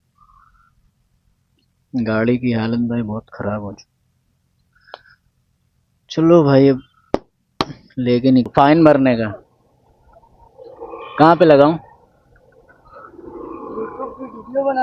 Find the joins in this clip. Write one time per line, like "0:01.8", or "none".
0:08.5